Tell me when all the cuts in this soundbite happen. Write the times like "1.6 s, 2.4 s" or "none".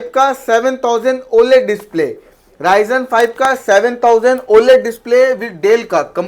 none